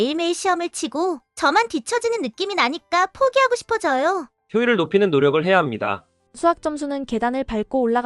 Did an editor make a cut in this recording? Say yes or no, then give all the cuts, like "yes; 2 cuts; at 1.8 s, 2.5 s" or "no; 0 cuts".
no; 0 cuts